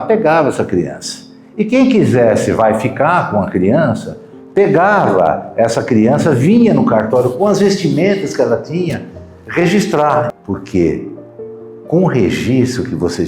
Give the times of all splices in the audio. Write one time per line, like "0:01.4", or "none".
0:10.3